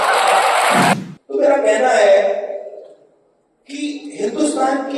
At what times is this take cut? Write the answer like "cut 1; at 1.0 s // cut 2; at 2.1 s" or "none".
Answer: cut 1; at 0.9 s